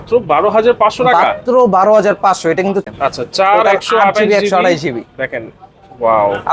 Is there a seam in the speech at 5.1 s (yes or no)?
no